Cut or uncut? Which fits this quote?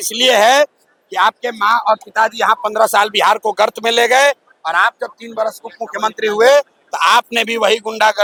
uncut